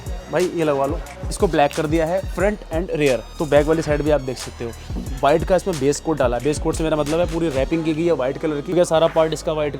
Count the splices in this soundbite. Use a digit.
4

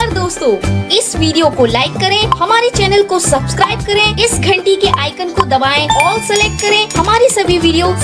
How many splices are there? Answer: 0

